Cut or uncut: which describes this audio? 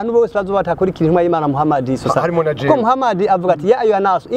uncut